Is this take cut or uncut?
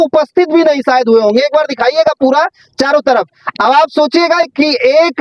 uncut